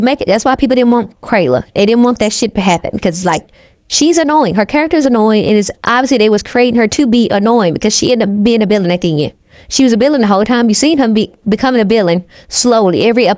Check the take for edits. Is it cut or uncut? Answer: uncut